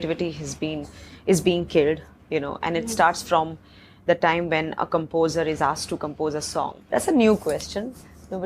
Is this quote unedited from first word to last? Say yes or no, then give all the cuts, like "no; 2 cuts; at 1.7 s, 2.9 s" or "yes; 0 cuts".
no; 1 cut; at 6.8 s